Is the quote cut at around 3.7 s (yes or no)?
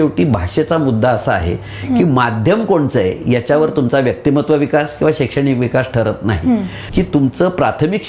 no